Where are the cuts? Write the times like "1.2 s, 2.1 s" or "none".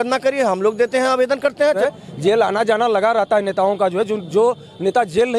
1.8 s